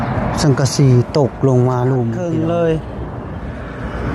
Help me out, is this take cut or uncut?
cut